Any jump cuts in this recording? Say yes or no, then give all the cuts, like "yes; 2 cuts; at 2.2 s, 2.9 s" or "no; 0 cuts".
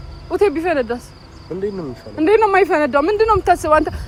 no; 0 cuts